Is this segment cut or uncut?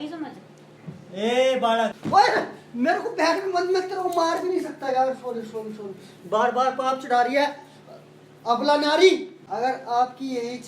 cut